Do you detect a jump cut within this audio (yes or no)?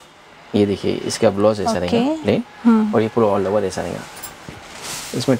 no